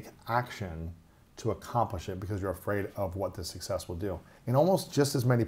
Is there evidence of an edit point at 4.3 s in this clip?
yes; 1 cut; at 4.3 s

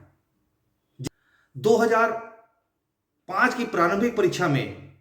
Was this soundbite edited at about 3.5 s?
no; 1 cut; at 1.1 s

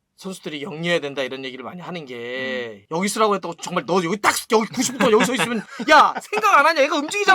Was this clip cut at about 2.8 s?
yes; 1 cut; at 2.8 s

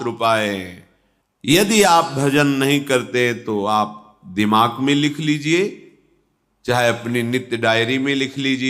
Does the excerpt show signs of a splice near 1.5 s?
yes; 1 cut; at 1.5 s

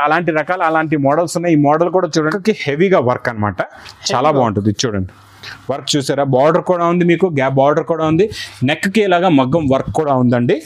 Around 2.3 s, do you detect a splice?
yes; 1 cut; at 2.3 s

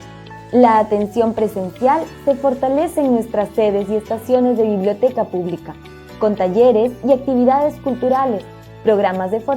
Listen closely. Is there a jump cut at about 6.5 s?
no; 1 cut; at 1.0 s

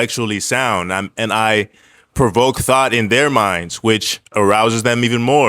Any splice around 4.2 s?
yes; 1 cut; at 4.2 s

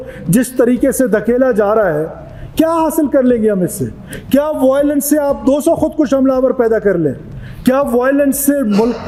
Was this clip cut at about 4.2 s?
no; 0 cuts

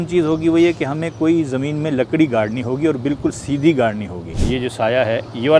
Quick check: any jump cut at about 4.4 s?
yes; 1 cut; at 4.4 s

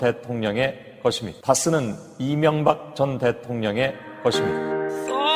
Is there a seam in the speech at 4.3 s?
yes; 1 cut; at 4.3 s

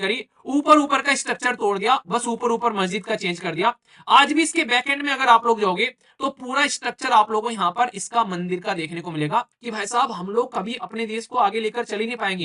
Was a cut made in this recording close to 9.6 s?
yes; 1 cut; at 9.6 s

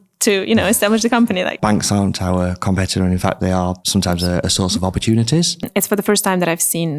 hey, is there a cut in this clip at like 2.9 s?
no; 3 cuts; at 1.6 s, 4.2 s, 5.6 s

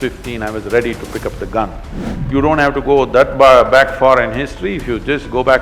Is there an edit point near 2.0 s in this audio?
yes; 1 cut; at 2.0 s

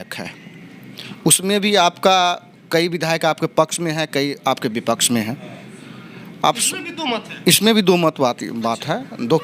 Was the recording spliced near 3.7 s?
no; 0 cuts

